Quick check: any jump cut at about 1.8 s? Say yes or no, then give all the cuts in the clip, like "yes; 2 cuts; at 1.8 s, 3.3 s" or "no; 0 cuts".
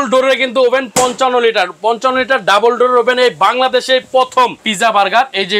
no; 1 cut; at 4.6 s